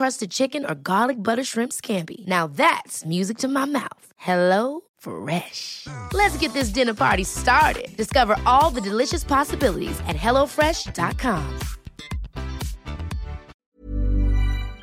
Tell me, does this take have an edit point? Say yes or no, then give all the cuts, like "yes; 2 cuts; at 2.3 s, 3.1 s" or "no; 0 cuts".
yes; 1 cut; at 13.6 s